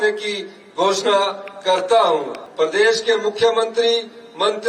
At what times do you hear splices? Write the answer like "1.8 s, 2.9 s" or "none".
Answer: 2.4 s